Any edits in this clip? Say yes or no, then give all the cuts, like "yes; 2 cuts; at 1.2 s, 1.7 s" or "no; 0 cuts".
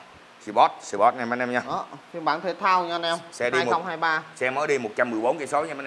no; 0 cuts